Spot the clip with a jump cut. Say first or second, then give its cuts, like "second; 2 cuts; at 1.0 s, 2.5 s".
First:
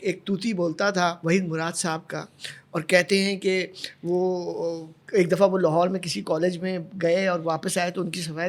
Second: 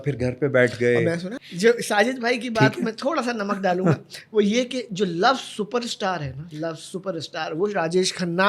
second; 1 cut; at 1.4 s